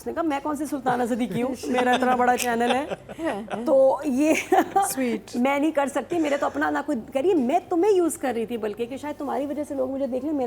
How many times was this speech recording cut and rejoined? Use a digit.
0